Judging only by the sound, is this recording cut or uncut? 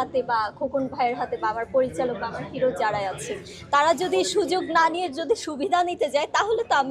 uncut